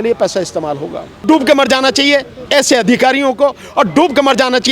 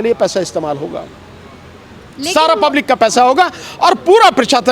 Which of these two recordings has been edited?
first; 1 cut; at 1.1 s

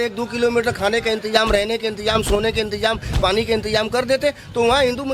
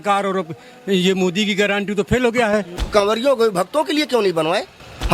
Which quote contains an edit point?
second; 1 cut; at 2.8 s

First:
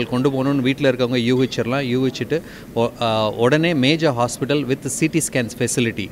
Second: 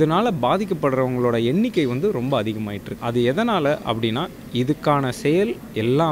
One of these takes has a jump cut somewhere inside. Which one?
second; 1 cut; at 2.9 s

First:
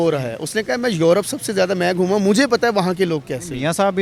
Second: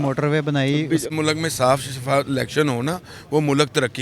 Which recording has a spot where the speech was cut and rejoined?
second; 1 cut; at 1.0 s

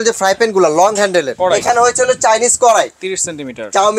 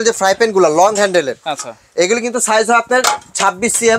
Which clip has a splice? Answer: first; 1 cut; at 1.3 s

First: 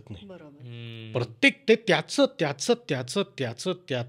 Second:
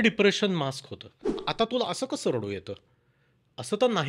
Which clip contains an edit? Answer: second; 1 cut; at 1.5 s

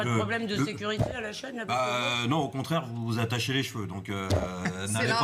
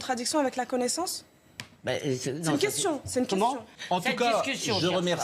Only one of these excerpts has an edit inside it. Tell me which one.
second; 1 cut; at 3.7 s

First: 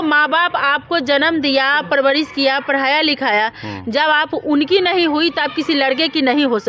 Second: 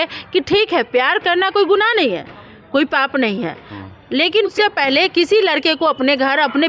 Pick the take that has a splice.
second; 1 cut; at 4.5 s

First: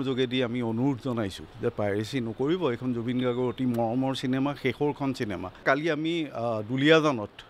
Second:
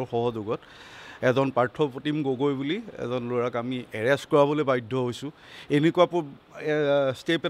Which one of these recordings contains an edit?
first; 1 cut; at 5.6 s

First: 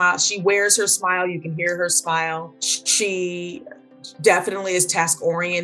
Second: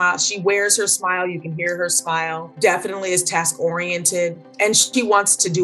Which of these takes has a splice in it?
second; 1 cut; at 2.5 s

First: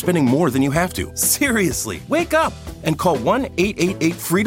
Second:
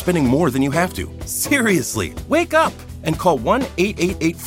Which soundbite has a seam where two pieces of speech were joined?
first; 1 cut; at 1.5 s

